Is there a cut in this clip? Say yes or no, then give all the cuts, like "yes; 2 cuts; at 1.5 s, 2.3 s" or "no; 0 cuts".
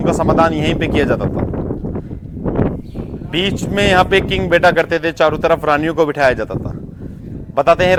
no; 0 cuts